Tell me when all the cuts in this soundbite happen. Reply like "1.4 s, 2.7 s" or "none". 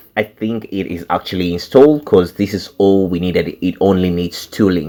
none